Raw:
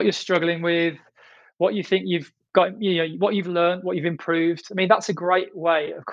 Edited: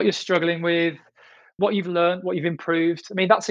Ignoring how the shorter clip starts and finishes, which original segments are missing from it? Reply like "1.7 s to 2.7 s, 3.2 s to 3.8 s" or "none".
1.5 s to 3.1 s